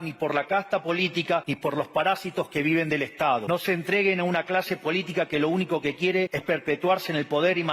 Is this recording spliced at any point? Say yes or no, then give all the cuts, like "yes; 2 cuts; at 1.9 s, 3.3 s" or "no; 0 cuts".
yes; 3 cuts; at 1.5 s, 3.4 s, 6.4 s